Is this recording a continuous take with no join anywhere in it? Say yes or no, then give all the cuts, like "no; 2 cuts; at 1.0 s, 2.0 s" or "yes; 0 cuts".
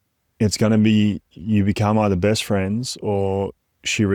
yes; 0 cuts